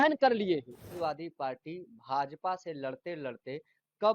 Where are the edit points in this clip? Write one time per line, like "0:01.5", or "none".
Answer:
0:00.9